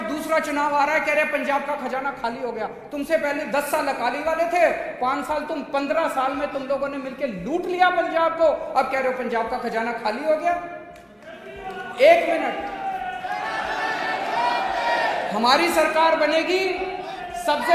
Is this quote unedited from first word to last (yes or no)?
yes